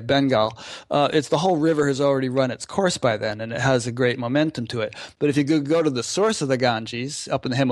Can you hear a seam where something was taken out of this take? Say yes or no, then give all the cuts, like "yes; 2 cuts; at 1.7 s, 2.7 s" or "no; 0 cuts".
yes; 1 cut; at 5.0 s